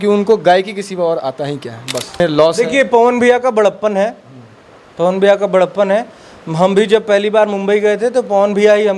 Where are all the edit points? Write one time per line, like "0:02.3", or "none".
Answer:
0:02.2